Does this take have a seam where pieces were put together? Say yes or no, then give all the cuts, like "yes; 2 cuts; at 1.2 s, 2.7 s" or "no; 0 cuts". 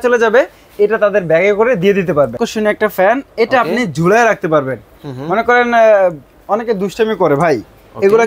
yes; 1 cut; at 2.4 s